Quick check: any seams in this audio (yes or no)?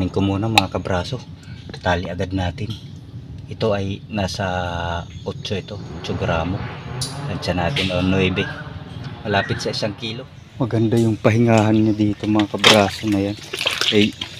yes